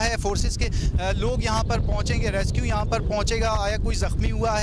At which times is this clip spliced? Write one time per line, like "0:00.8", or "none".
none